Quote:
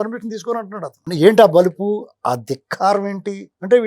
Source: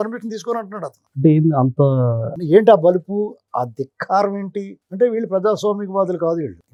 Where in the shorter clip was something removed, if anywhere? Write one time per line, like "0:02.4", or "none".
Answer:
0:01.0